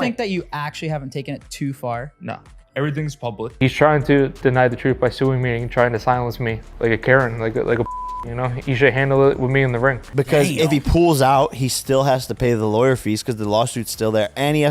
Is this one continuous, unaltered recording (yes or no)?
no